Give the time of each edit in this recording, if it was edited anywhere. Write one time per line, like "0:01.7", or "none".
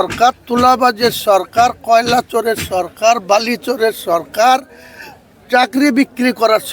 none